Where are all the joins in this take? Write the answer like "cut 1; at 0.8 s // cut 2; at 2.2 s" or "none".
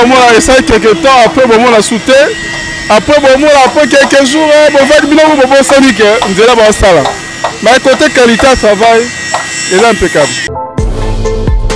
cut 1; at 10.4 s